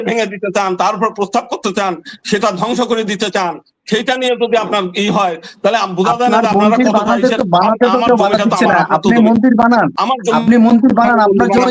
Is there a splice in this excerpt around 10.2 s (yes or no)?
no